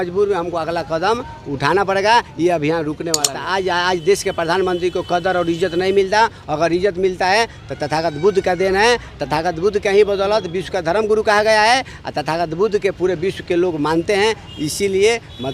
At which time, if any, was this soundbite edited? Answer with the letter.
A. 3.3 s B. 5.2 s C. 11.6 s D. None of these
A